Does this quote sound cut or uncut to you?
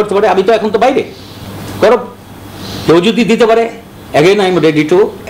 uncut